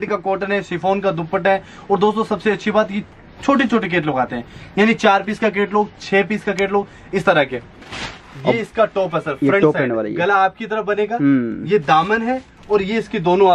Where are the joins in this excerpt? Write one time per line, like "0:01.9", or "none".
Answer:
0:08.0